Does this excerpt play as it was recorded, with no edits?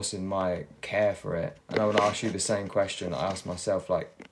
no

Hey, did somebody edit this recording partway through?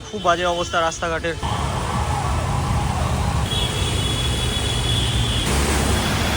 no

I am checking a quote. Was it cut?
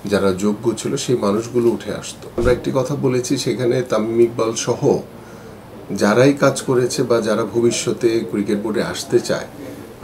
yes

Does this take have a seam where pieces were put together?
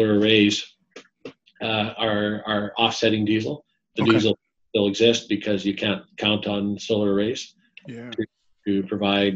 no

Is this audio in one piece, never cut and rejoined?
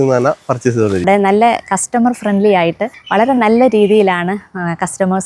no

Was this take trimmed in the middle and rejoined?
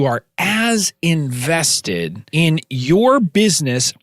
yes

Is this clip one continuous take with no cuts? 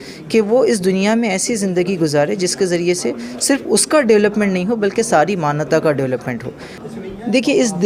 no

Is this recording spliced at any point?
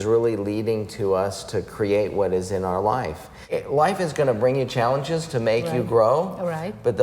yes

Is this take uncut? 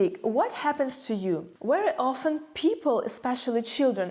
no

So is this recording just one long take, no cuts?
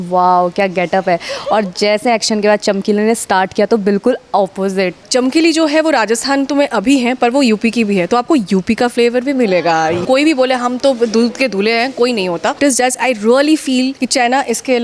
no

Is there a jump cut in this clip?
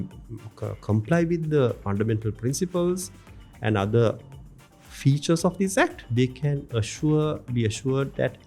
yes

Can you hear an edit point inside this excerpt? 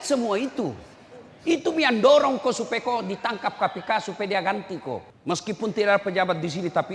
yes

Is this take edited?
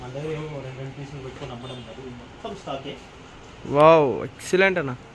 no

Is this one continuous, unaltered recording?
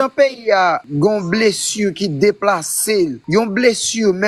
no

